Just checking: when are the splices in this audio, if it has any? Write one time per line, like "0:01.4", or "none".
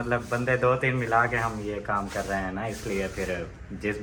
none